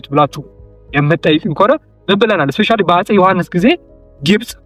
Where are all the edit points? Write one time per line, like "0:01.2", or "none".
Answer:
none